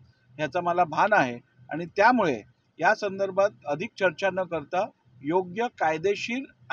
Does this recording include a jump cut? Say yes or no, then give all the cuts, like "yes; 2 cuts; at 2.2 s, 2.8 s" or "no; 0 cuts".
no; 0 cuts